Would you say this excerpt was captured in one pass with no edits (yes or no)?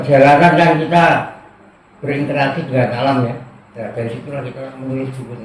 yes